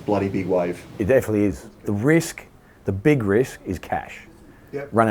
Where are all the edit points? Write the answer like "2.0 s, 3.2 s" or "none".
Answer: 1.3 s